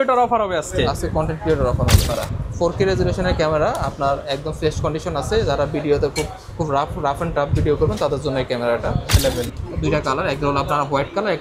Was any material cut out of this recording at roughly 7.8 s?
no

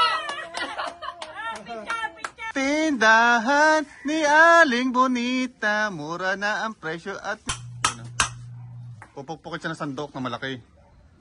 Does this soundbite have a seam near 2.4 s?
yes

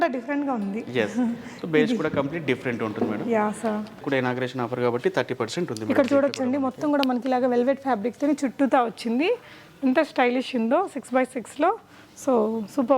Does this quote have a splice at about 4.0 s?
yes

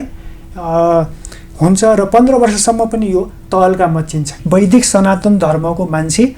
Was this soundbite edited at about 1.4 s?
no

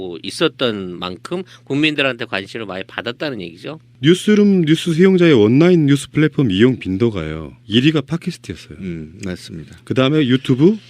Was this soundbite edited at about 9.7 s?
yes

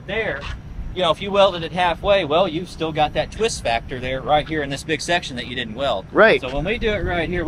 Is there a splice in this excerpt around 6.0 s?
no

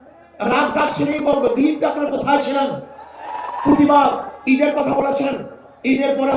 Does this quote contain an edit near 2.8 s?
no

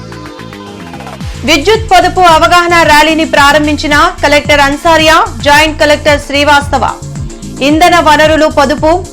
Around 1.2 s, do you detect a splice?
yes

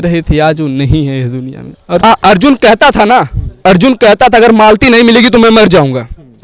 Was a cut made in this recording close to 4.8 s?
no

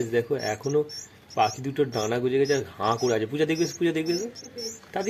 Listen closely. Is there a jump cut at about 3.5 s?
no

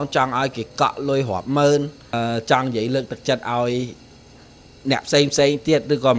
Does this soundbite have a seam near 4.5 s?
no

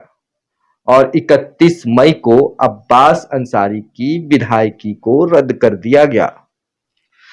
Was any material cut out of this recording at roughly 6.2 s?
no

